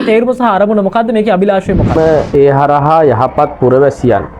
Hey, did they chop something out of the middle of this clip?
yes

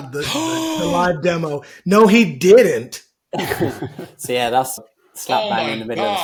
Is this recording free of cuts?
yes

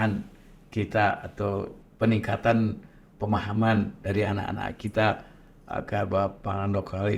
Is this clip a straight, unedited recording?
no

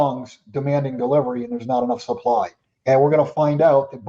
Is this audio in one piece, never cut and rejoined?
no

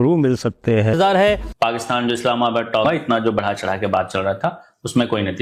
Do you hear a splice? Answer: no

